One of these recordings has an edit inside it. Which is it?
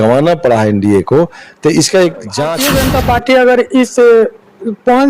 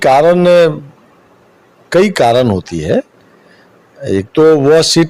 first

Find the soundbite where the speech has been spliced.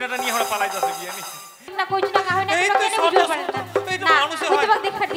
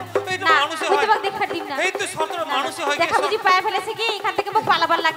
first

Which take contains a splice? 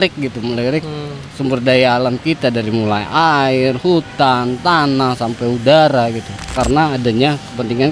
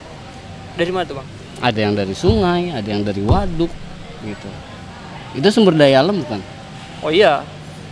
first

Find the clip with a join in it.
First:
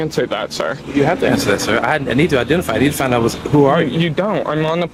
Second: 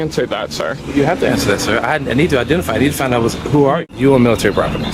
second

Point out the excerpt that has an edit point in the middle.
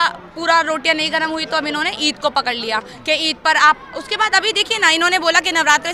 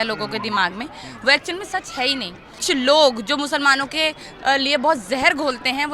second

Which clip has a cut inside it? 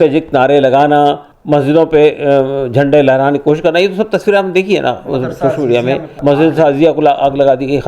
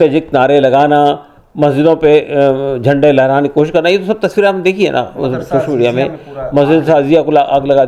first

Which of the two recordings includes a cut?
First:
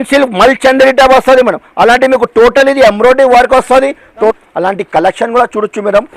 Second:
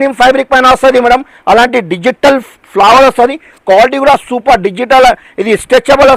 first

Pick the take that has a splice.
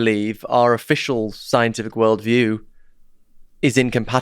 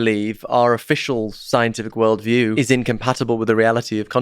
second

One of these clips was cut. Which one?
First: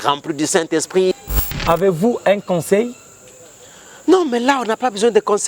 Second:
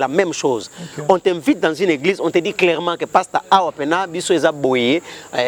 first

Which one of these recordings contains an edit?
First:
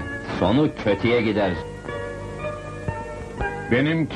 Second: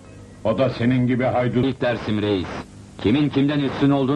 second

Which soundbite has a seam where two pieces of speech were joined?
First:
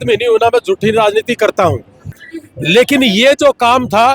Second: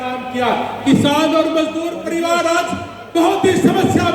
first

